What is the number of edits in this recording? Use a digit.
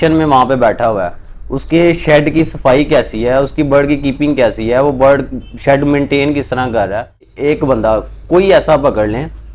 1